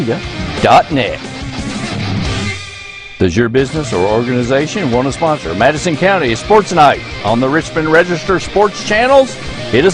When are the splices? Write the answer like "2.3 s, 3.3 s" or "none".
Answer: none